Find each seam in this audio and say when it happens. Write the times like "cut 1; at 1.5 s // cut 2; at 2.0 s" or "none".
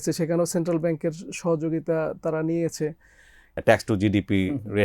cut 1; at 3.6 s